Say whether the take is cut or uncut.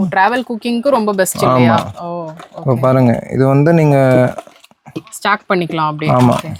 uncut